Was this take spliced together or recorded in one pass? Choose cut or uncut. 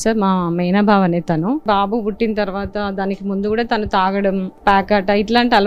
cut